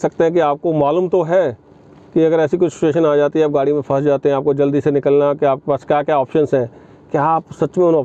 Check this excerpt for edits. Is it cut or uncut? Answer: uncut